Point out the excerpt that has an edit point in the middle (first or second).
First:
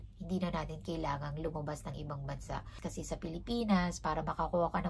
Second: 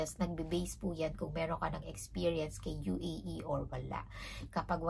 first